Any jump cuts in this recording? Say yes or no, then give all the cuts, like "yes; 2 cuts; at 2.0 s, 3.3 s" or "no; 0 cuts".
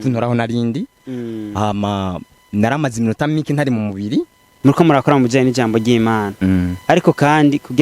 yes; 1 cut; at 4.5 s